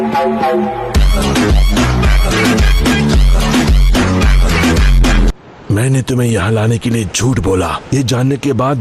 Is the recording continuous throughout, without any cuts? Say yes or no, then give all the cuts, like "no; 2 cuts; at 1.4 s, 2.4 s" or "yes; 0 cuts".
no; 1 cut; at 5.8 s